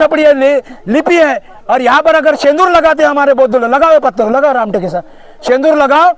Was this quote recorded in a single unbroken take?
yes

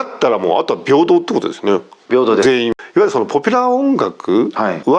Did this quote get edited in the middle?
yes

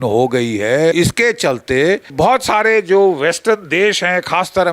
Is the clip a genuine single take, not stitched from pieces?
no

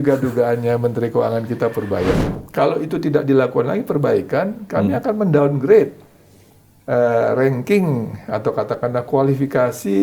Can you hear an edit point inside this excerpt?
yes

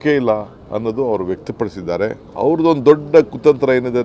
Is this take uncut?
no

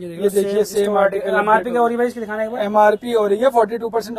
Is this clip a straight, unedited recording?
yes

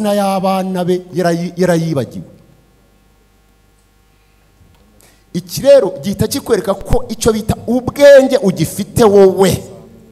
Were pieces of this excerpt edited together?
no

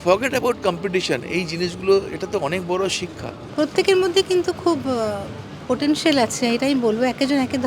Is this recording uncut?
yes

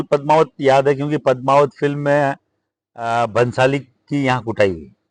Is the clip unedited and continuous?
yes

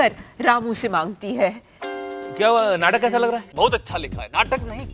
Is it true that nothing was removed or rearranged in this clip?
no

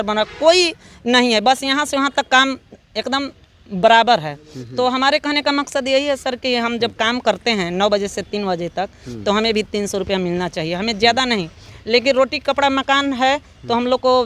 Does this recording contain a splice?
no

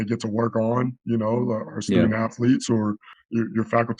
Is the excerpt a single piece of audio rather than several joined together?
no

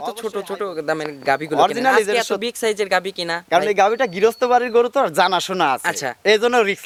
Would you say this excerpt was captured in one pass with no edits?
yes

